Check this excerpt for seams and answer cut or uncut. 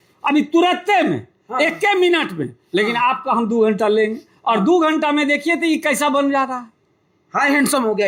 uncut